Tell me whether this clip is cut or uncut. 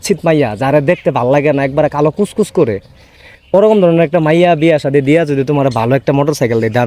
uncut